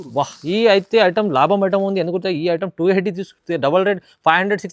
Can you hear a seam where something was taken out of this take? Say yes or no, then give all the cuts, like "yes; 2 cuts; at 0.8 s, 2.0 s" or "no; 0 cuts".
no; 0 cuts